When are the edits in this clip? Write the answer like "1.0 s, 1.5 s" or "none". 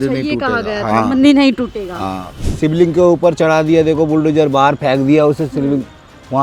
2.3 s